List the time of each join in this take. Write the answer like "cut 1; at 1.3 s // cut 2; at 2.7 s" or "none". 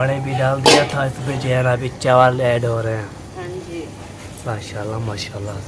none